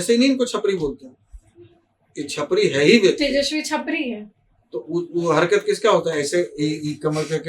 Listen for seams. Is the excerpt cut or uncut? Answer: uncut